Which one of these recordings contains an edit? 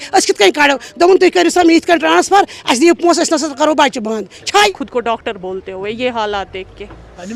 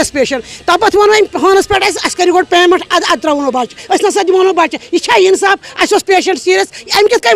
first; 1 cut; at 4.7 s

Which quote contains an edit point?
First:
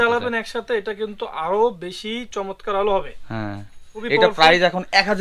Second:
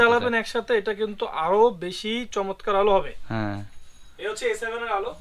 first; 1 cut; at 4.0 s

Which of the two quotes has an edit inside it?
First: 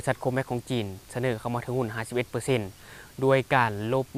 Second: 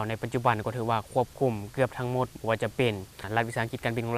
second; 1 cut; at 3.2 s

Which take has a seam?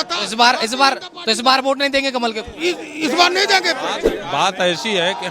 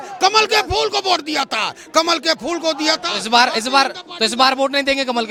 first; 1 cut; at 4.1 s

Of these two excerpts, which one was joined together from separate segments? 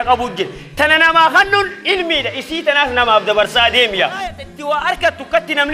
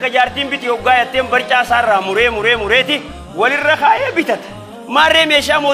first; 1 cut; at 4.5 s

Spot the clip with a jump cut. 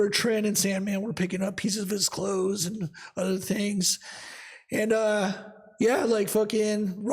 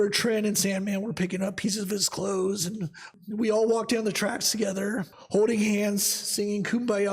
second; 2 cuts; at 3.1 s, 5.2 s

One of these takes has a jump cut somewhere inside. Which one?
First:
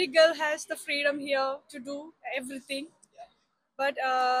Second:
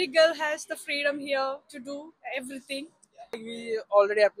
second; 1 cut; at 3.5 s

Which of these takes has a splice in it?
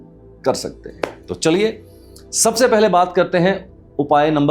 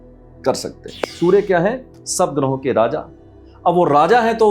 second; 1 cut; at 1.0 s

